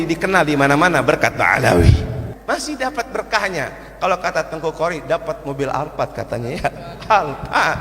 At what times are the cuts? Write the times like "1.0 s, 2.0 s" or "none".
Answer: 2.3 s